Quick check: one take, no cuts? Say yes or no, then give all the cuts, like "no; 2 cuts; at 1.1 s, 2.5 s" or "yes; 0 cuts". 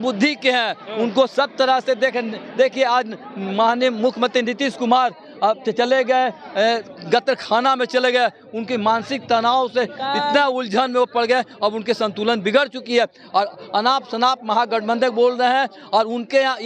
yes; 0 cuts